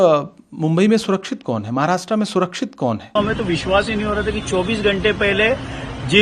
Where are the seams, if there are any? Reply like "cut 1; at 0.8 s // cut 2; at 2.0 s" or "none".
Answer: cut 1; at 3.2 s

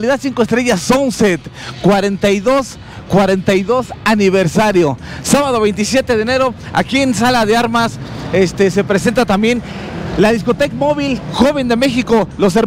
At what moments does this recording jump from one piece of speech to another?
none

